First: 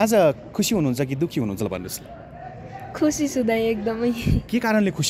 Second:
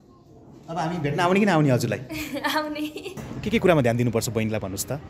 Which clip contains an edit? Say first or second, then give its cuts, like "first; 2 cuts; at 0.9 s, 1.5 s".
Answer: second; 1 cut; at 3.2 s